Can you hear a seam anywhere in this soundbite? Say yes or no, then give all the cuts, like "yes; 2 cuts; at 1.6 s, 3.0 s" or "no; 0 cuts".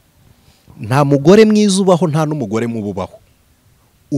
no; 0 cuts